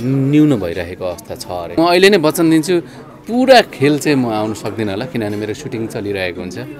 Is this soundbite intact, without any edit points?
no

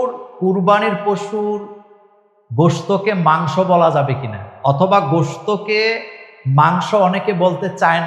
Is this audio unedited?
yes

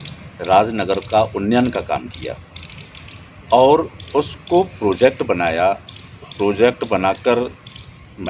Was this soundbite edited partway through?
no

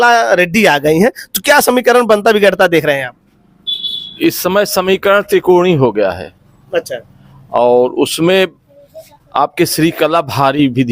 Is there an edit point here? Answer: no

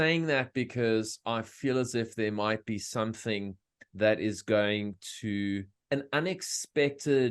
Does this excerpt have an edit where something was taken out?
yes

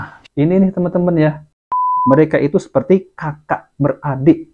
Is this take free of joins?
no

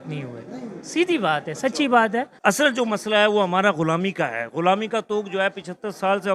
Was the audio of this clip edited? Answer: yes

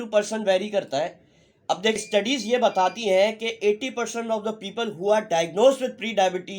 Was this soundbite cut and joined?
yes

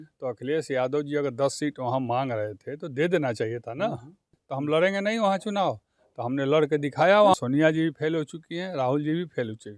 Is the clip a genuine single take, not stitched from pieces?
no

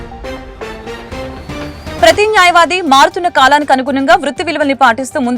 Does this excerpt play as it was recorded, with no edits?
no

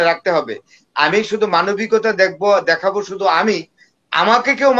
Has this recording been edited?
no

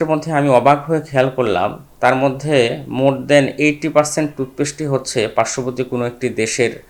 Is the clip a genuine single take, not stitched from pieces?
yes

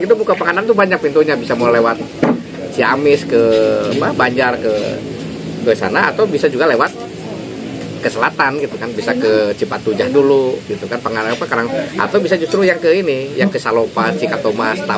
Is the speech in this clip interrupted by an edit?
no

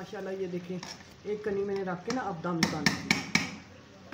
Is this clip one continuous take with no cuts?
yes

